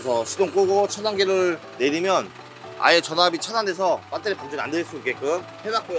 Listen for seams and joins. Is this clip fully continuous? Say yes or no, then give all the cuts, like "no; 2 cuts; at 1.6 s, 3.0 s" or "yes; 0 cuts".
yes; 0 cuts